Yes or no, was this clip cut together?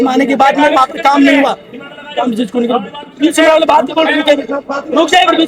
no